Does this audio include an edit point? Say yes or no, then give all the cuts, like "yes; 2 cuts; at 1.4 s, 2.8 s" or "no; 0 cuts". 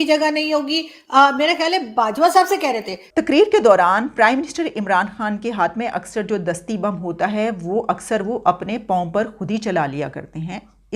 yes; 1 cut; at 2.9 s